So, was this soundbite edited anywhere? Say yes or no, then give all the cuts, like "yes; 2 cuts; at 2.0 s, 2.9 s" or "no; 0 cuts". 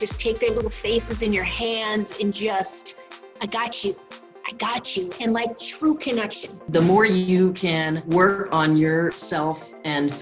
yes; 3 cuts; at 6.5 s, 8.0 s, 9.2 s